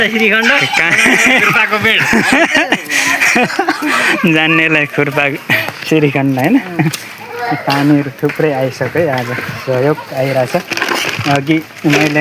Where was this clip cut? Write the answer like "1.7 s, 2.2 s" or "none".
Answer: none